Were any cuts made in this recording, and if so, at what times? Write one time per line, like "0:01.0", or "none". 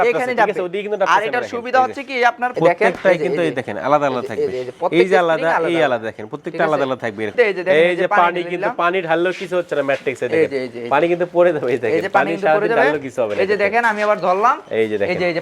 0:02.5
0:07.3